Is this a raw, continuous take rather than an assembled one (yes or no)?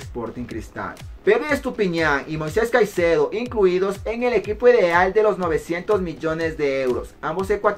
no